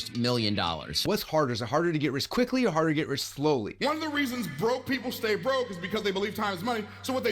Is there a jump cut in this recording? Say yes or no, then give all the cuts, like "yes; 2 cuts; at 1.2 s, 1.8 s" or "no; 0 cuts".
yes; 1 cut; at 0.9 s